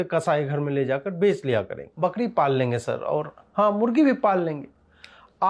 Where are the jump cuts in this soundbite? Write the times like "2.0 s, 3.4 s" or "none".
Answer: 1.8 s